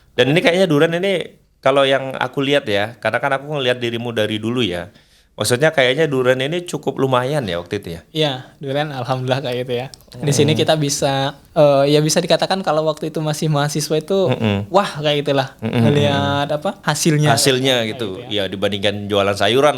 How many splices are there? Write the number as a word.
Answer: two